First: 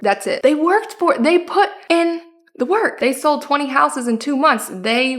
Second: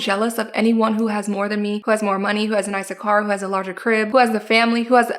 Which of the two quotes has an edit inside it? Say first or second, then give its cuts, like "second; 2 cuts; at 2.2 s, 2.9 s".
first; 1 cut; at 2.9 s